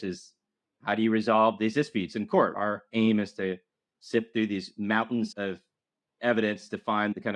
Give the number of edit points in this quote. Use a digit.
1